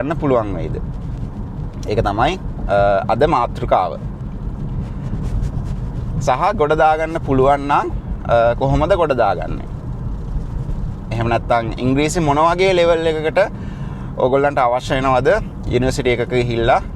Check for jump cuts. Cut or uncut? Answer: uncut